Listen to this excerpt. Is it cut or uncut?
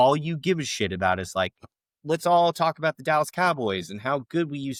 uncut